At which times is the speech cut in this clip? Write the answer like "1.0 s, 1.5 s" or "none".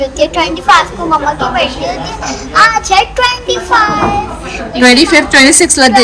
none